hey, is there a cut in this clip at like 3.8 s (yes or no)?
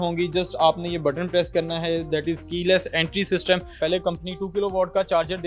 yes